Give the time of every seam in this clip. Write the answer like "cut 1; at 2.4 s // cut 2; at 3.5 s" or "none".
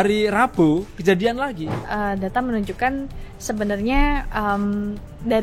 cut 1; at 1.8 s